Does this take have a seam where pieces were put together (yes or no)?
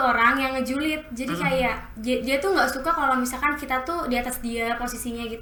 no